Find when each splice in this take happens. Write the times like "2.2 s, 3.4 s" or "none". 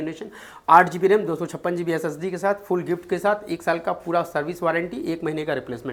none